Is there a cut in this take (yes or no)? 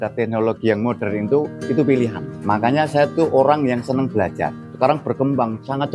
yes